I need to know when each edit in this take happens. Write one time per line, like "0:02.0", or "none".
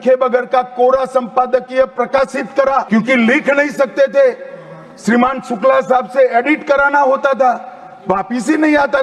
0:02.9